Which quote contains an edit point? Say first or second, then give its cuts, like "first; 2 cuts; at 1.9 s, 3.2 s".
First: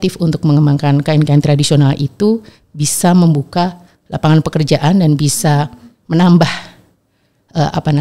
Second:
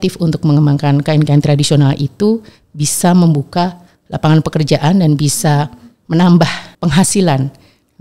second; 1 cut; at 6.6 s